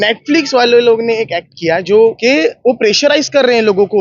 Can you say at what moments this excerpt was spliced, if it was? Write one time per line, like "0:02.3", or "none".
0:02.2